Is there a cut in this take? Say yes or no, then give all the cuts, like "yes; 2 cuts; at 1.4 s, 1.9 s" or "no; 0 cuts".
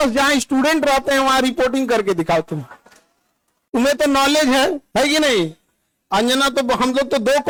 no; 0 cuts